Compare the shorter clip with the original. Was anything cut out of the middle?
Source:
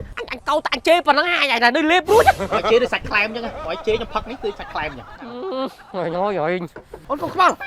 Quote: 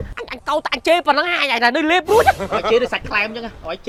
no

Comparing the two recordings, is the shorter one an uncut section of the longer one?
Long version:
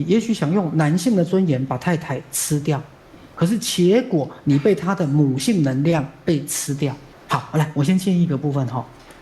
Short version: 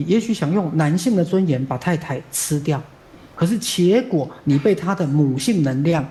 yes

